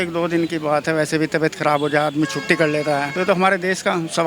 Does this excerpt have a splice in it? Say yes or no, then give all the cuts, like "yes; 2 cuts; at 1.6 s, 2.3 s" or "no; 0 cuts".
yes; 1 cut; at 3.1 s